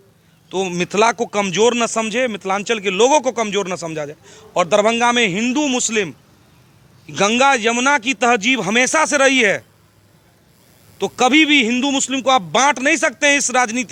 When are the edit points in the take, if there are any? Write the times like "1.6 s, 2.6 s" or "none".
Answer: none